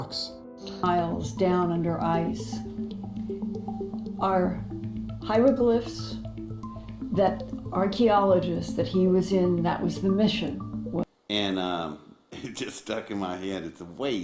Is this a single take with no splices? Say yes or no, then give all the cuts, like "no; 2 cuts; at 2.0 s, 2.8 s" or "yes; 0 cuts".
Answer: no; 2 cuts; at 0.8 s, 11.1 s